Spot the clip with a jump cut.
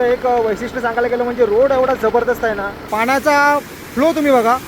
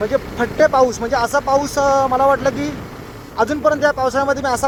first; 1 cut; at 2.9 s

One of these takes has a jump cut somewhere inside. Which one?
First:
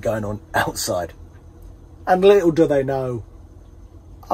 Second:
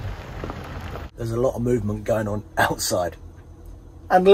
second; 1 cut; at 1.1 s

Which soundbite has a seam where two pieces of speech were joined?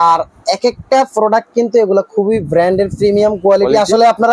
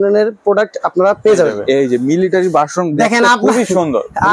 second; 1 cut; at 1.6 s

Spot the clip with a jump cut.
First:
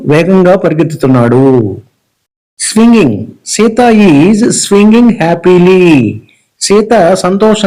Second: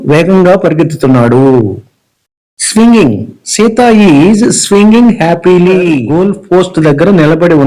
second; 1 cut; at 6.0 s

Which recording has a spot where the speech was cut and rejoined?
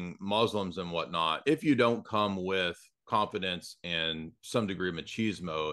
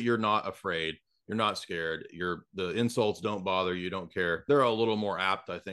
second; 1 cut; at 4.4 s

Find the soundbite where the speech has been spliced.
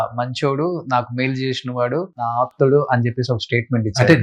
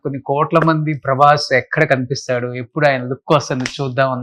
first; 1 cut; at 2.2 s

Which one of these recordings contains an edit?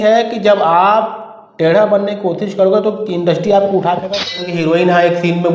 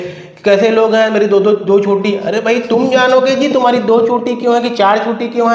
first; 1 cut; at 4.3 s

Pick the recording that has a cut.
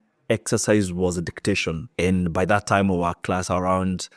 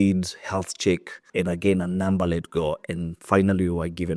second; 1 cut; at 1.2 s

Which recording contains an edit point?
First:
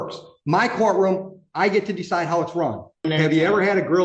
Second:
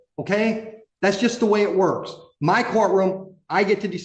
first; 1 cut; at 3.1 s

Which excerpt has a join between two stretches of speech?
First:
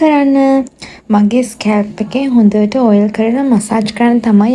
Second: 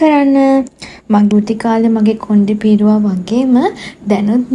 second; 1 cut; at 1.3 s

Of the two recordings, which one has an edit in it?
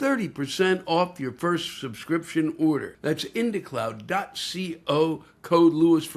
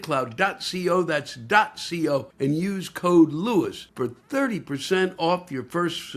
second; 1 cut; at 2.3 s

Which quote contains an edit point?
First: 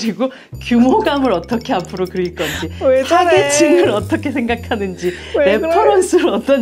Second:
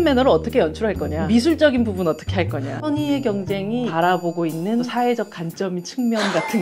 second; 4 cuts; at 1.1 s, 2.7 s, 3.9 s, 4.9 s

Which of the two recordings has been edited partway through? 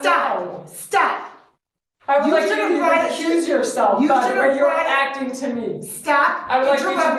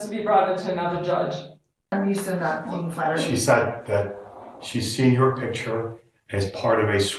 second; 1 cut; at 1.9 s

